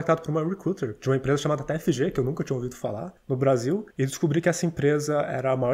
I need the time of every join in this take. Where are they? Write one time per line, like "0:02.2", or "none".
0:00.9
0:03.1
0:03.9